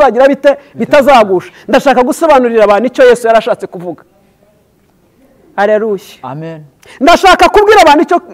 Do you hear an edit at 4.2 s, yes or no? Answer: no